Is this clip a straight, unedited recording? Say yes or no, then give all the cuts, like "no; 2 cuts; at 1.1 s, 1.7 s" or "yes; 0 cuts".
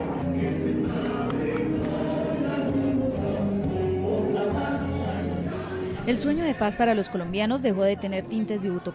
no; 1 cut; at 6.7 s